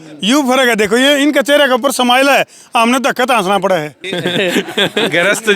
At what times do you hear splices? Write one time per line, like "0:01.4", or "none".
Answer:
0:04.1